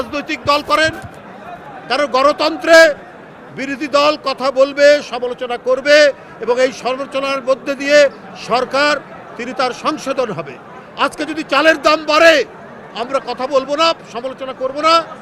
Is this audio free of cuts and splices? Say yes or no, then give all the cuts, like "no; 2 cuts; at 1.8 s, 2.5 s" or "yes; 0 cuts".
yes; 0 cuts